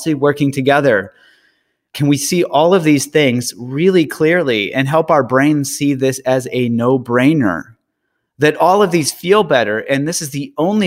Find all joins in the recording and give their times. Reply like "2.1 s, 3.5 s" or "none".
1.9 s